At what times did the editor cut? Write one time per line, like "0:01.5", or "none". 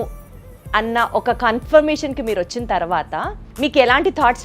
0:03.4